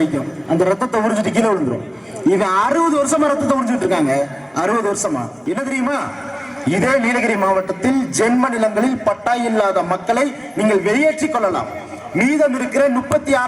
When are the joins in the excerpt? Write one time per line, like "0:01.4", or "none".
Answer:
0:05.4